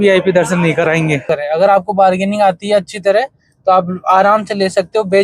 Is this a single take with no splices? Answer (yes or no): no